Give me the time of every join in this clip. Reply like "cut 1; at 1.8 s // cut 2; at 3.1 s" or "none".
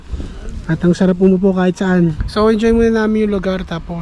none